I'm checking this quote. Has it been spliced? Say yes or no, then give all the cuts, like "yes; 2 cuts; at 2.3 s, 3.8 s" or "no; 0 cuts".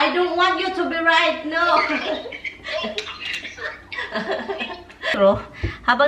yes; 1 cut; at 5.2 s